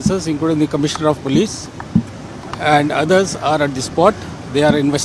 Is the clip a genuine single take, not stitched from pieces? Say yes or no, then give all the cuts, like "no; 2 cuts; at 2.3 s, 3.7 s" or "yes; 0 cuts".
yes; 0 cuts